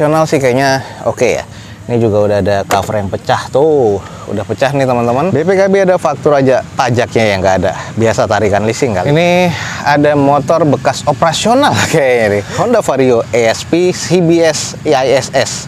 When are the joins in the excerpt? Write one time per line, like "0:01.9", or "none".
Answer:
0:05.3
0:09.0
0:12.5